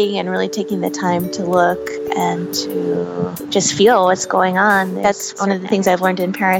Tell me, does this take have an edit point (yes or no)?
yes